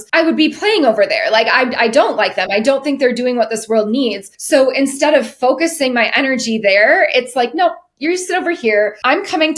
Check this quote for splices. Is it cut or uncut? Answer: uncut